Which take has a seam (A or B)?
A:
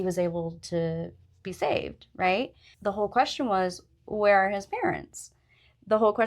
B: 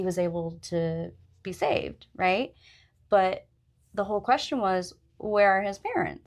A